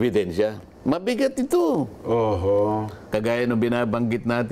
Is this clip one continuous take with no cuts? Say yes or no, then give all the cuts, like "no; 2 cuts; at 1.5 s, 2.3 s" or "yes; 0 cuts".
no; 1 cut; at 3.1 s